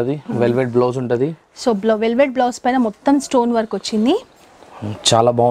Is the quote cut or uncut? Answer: uncut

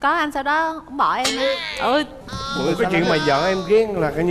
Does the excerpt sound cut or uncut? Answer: cut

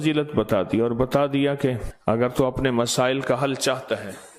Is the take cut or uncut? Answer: cut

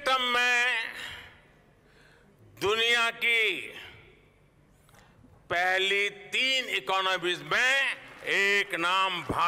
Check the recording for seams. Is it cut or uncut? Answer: uncut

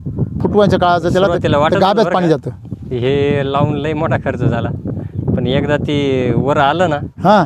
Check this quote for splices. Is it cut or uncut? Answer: uncut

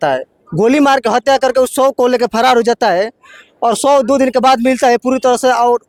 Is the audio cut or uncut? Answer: uncut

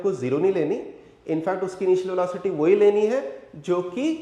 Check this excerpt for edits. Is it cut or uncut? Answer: uncut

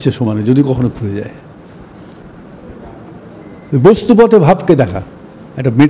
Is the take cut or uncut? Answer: uncut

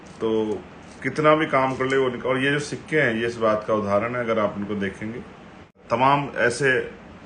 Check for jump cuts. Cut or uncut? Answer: cut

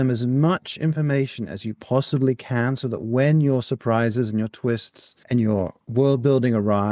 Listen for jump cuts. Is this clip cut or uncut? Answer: cut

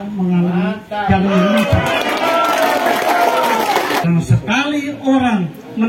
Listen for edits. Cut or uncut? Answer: cut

